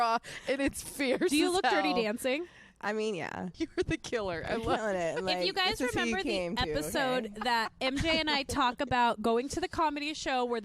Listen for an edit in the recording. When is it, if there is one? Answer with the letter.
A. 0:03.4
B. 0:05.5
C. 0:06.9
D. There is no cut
A